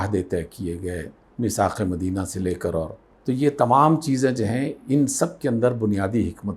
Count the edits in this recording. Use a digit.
0